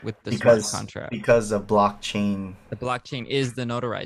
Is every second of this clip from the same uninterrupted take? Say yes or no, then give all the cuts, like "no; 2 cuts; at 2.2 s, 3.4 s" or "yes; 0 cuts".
yes; 0 cuts